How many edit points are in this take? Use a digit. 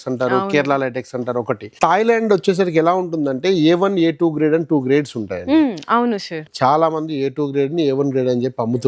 2